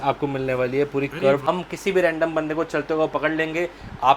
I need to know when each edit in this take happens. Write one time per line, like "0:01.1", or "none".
0:01.4